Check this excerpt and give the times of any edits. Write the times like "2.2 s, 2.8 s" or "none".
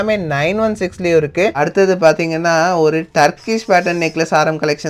1.6 s